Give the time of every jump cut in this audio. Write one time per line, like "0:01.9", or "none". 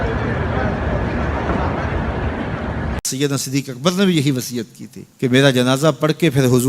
0:03.0